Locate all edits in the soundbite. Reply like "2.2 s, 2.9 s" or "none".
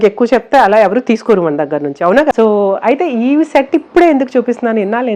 2.3 s